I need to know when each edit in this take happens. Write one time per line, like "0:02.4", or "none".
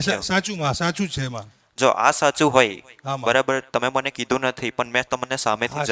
none